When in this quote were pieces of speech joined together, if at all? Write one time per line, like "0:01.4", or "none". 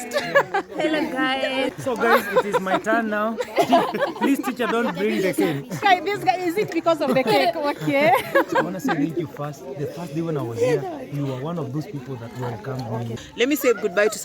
0:01.8
0:13.2